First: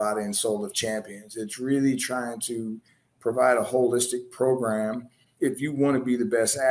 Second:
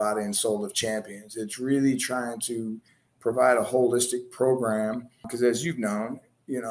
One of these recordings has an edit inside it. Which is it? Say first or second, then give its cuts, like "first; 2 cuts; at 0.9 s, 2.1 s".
first; 1 cut; at 5.2 s